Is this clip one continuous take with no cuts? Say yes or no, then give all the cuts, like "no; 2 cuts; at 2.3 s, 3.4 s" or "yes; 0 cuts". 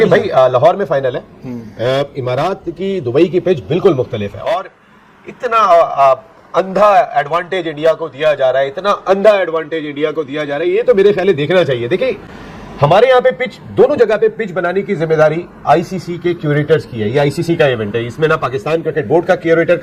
yes; 0 cuts